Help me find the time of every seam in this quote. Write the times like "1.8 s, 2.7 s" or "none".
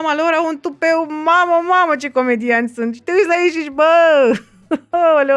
none